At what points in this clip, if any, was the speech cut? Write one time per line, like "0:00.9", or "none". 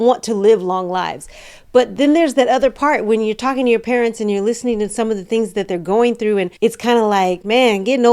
none